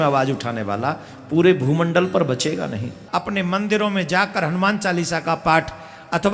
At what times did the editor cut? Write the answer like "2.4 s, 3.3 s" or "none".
2.9 s